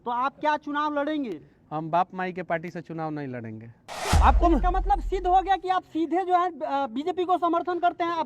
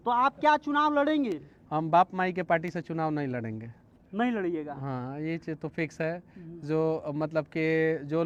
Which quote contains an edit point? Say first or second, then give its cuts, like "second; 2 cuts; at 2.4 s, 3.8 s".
first; 1 cut; at 4.0 s